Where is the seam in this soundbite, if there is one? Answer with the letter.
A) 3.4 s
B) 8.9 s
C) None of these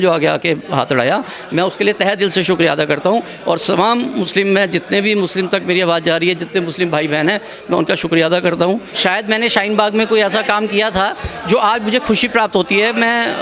B